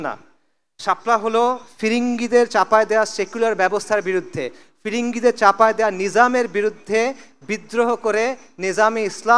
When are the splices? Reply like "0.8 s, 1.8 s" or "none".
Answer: none